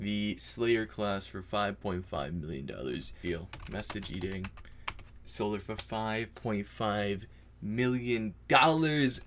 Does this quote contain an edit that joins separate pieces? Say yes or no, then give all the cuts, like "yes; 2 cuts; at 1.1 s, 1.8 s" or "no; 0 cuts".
yes; 1 cut; at 3.2 s